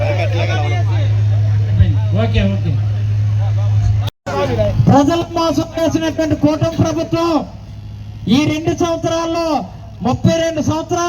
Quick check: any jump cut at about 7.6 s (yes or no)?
no